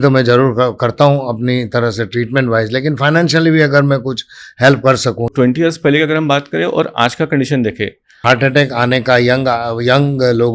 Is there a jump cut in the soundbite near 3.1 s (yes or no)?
no